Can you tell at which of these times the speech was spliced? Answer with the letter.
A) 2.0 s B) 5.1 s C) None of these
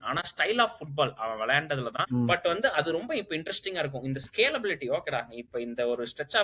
A